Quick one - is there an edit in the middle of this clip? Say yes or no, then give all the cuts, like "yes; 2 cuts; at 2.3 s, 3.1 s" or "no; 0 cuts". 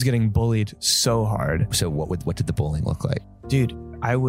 yes; 2 cuts; at 1.7 s, 3.3 s